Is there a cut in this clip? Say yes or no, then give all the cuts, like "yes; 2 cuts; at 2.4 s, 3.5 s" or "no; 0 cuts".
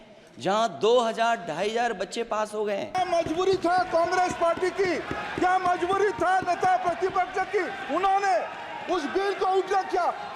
yes; 1 cut; at 2.9 s